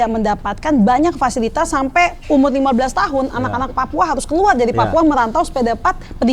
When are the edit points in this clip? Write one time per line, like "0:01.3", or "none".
none